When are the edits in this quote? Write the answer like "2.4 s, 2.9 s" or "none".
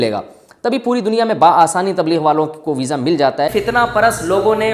3.5 s